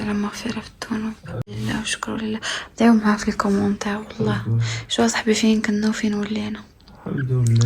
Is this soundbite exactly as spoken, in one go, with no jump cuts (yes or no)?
no